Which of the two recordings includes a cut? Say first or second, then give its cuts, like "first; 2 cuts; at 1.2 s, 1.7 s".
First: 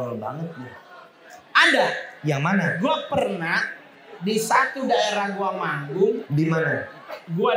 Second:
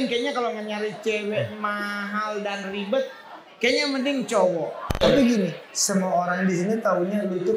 second; 1 cut; at 4.9 s